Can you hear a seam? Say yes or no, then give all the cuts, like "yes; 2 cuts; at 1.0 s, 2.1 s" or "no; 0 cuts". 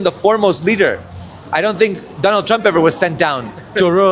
yes; 1 cut; at 1.4 s